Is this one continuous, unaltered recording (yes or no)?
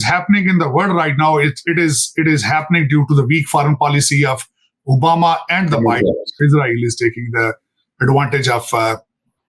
no